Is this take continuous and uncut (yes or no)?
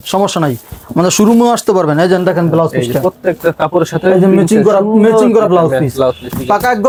yes